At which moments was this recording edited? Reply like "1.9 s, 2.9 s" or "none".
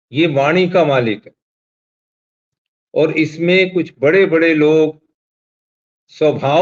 none